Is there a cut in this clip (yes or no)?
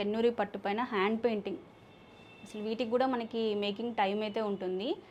no